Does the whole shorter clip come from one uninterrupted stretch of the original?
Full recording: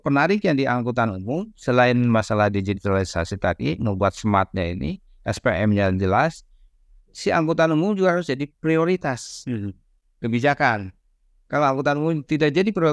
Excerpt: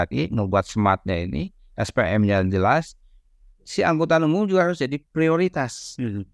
yes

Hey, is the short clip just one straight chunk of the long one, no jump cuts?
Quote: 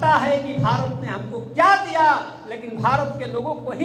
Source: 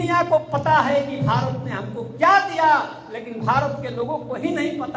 yes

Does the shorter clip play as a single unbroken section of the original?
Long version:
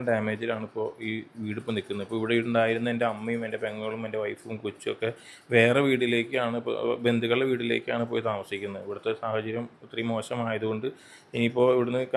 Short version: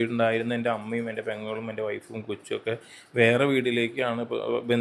yes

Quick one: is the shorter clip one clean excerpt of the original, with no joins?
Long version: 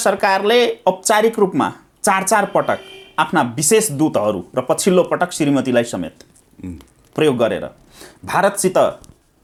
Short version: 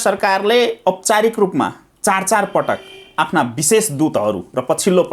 yes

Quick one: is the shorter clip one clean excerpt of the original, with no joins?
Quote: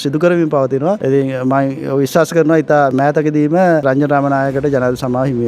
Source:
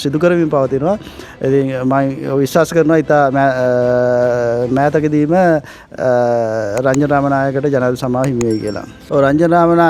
no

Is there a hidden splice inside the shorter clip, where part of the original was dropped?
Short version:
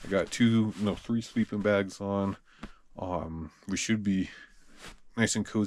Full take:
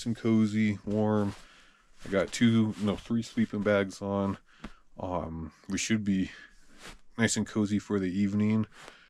no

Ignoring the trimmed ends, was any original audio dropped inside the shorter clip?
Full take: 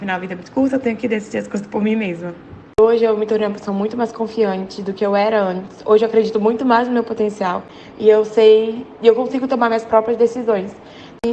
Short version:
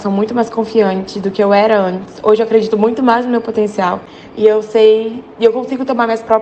no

